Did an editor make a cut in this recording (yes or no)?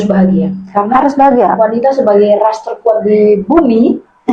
no